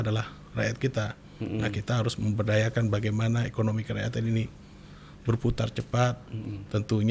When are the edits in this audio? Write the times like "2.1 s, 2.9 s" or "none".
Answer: none